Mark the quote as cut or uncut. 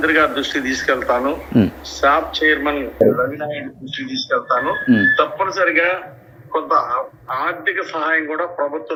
uncut